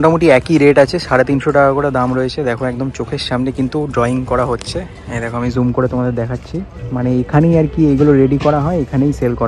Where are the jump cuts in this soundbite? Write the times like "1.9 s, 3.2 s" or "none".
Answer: none